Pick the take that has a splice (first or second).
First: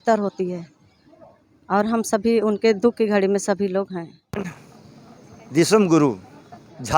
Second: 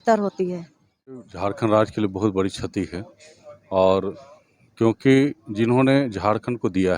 second